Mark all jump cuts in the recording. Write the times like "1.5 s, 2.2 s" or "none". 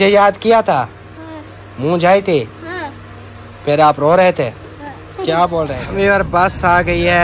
5.8 s